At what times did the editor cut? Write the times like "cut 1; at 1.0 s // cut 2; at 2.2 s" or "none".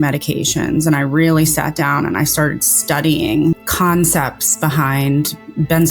cut 1; at 3.7 s